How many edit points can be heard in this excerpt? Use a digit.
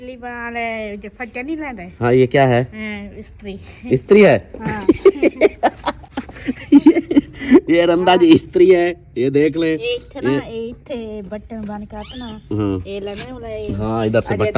0